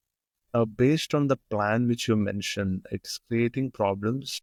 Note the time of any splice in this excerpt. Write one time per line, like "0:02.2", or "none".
none